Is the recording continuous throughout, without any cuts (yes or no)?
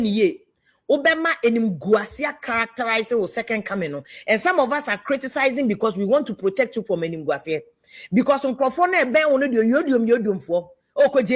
yes